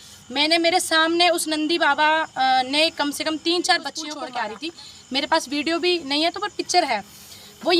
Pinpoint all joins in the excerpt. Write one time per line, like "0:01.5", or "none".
0:04.2